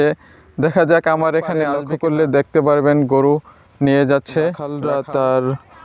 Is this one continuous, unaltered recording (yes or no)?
no